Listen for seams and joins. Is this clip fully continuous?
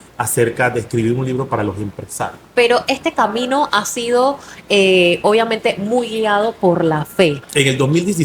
no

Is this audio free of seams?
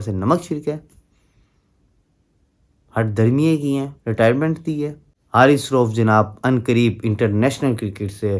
no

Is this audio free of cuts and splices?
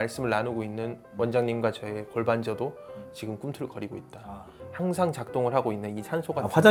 yes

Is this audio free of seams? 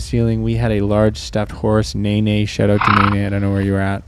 yes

